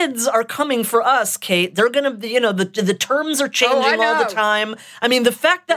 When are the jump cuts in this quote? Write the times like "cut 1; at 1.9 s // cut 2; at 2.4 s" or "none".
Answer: none

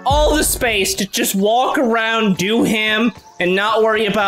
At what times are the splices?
none

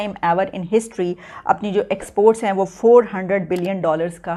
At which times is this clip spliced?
none

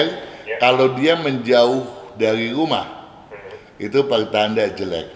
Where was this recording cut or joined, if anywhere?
none

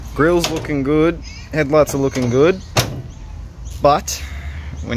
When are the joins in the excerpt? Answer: none

